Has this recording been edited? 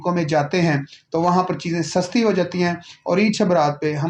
no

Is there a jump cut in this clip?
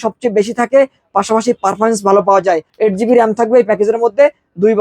yes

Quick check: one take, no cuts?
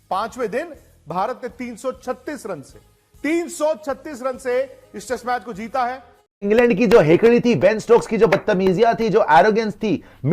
no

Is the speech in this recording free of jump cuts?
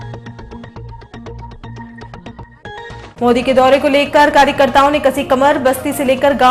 no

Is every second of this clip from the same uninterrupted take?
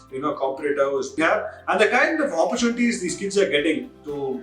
no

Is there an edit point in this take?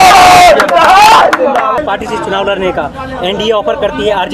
yes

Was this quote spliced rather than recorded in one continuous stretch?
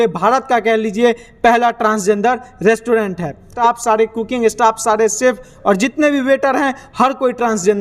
yes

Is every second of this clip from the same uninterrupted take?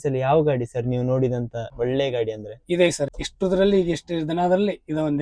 no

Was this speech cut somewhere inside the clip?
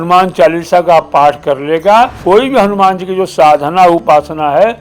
yes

